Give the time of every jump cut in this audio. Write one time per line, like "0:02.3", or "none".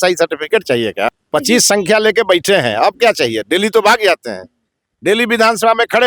0:01.1